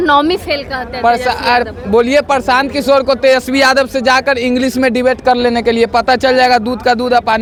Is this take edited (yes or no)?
no